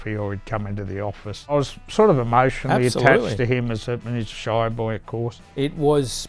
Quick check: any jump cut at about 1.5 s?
yes; 2 cuts; at 1.5 s, 5.4 s

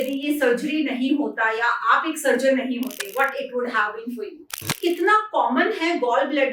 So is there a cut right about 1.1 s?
no; 1 cut; at 4.8 s

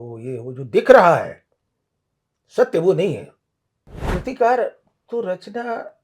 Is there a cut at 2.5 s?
no; 1 cut; at 4.1 s

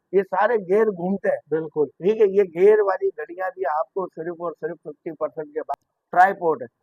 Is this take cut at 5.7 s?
yes; 1 cut; at 5.7 s

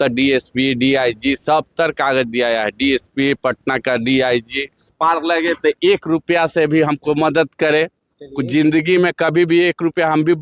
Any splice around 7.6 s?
no; 1 cut; at 4.9 s

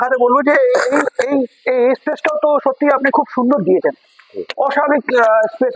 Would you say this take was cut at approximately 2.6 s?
no; 0 cuts

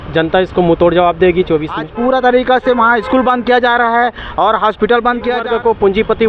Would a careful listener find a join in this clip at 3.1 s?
no; 2 cuts; at 1.8 s, 5.4 s

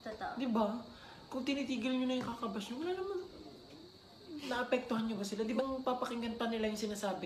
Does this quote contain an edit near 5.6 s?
yes; 1 cut; at 5.6 s

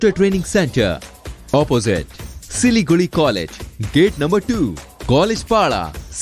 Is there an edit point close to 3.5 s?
no; 0 cuts

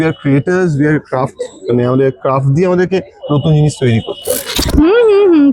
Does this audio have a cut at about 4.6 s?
yes; 1 cut; at 4.6 s

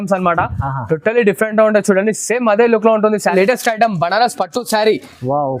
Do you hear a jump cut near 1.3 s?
no; 1 cut; at 3.3 s

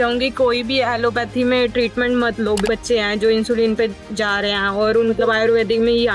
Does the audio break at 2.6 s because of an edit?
yes; 2 cuts; at 2.6 s, 5.2 s

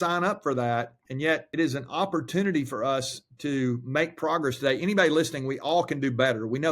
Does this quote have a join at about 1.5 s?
yes; 1 cut; at 1.5 s

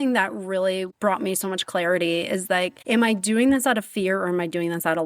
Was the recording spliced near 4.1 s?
no; 2 cuts; at 0.9 s, 2.8 s

